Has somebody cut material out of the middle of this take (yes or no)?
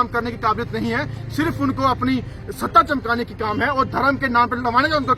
no